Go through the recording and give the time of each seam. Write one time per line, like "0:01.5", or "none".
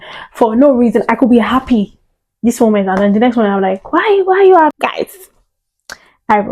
0:04.7